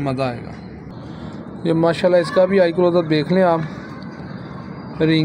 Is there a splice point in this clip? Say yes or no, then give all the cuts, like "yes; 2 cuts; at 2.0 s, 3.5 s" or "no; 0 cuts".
no; 0 cuts